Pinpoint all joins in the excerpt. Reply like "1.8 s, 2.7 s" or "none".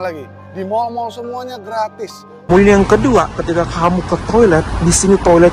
2.5 s